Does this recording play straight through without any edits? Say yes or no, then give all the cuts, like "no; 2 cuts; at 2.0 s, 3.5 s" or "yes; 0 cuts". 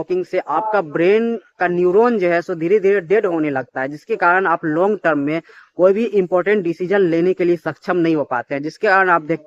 yes; 0 cuts